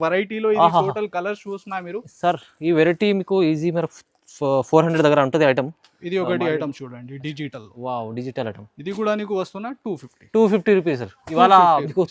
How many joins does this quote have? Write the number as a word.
zero